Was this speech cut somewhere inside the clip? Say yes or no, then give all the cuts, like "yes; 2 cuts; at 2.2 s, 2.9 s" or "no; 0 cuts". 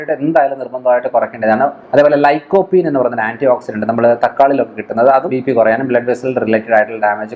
yes; 2 cuts; at 1.8 s, 5.3 s